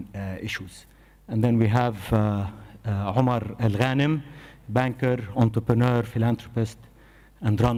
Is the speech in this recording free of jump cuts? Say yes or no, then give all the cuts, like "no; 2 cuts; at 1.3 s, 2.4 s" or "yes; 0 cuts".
yes; 0 cuts